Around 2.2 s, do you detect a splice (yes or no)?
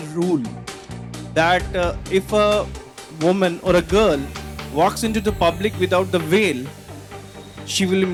no